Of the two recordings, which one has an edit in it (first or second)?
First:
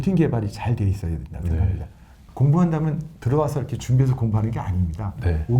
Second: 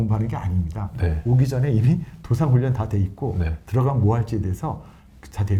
first